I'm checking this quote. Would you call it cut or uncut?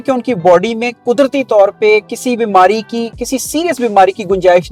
uncut